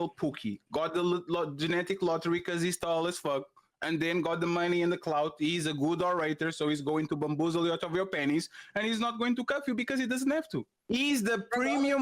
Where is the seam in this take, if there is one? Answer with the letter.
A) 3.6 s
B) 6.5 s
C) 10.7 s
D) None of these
C